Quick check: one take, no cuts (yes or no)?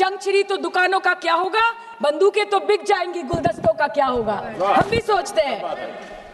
yes